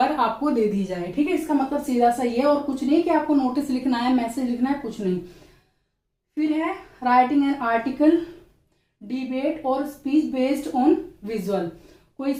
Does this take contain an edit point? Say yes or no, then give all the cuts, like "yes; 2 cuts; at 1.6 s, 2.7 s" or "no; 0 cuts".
no; 0 cuts